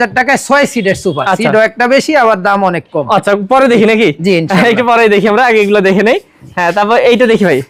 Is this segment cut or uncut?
uncut